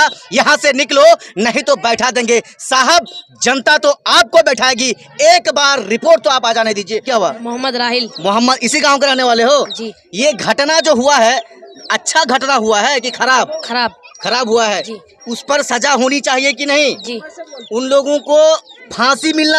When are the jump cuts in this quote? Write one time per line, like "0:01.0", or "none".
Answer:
0:07.1